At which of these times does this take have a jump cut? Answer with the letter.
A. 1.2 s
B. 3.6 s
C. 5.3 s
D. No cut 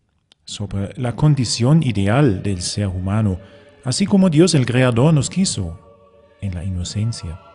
A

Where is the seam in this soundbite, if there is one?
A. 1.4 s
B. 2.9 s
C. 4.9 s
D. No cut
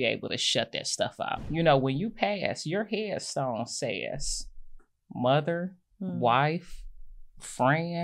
A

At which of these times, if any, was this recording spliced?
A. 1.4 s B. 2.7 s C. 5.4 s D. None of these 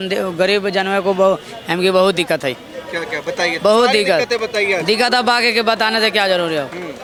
D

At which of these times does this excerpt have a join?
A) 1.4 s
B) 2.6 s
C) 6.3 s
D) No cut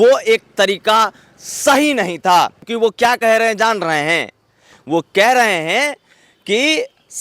B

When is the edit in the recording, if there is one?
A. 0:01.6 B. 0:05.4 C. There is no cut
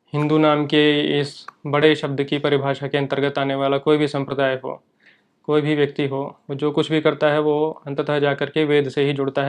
C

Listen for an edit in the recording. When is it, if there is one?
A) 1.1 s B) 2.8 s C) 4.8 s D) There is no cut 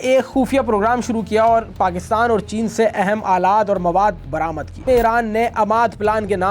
C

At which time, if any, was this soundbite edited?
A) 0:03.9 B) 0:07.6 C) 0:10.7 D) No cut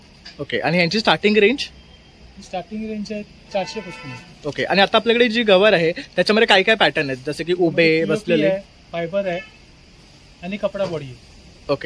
D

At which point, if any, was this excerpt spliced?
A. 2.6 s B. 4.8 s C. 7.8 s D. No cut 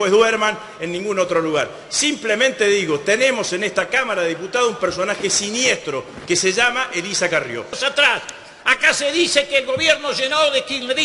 C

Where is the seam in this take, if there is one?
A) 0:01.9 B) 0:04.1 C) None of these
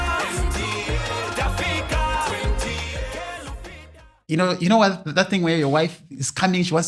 B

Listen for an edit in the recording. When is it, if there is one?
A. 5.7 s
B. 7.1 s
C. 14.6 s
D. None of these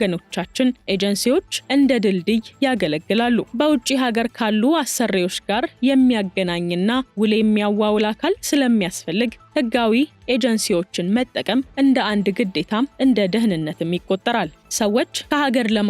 C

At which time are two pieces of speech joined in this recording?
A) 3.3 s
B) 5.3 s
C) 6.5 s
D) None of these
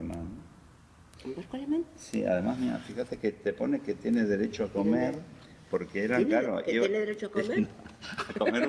C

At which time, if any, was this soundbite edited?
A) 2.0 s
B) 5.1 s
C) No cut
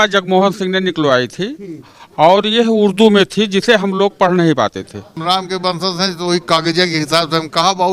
B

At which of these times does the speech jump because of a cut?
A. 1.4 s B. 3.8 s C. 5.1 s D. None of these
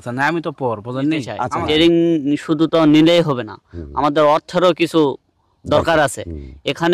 A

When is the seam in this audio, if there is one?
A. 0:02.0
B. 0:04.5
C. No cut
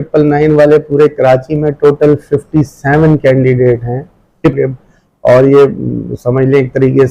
B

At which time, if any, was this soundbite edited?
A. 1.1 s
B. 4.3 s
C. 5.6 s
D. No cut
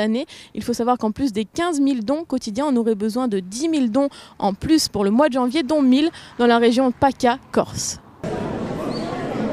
D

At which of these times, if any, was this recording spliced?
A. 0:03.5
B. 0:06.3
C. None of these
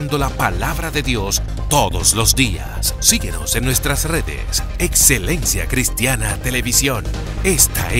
C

